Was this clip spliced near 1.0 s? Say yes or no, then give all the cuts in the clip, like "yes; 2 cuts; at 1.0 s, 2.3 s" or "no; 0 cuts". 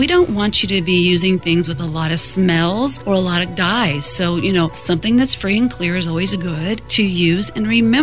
no; 0 cuts